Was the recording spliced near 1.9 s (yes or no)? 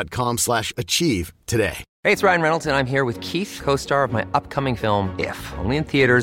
yes